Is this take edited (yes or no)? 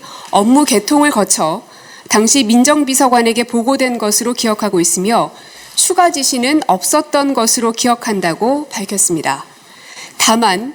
no